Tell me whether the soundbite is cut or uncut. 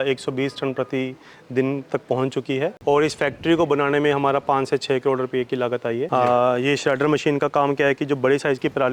cut